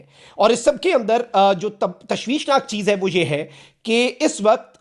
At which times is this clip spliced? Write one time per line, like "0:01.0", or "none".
none